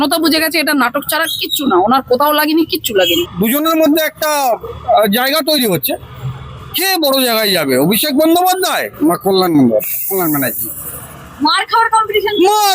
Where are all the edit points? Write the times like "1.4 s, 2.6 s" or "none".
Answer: 3.3 s